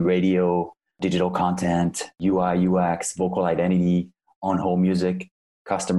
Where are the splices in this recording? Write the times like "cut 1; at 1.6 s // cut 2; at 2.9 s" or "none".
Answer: cut 1; at 1.0 s // cut 2; at 2.2 s